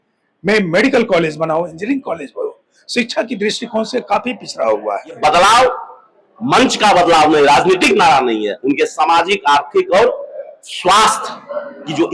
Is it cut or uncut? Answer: cut